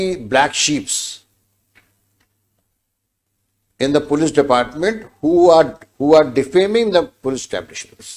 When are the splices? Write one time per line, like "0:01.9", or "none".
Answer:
none